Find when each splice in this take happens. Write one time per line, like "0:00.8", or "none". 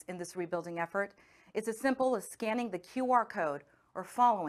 none